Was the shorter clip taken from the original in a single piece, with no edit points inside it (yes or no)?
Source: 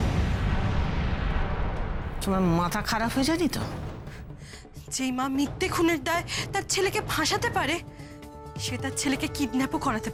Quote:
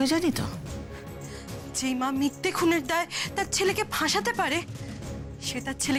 yes